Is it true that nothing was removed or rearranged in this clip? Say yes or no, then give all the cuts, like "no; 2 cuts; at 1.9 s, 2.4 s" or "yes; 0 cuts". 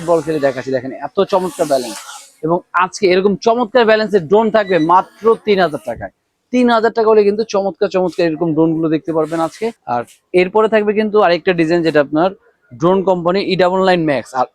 yes; 0 cuts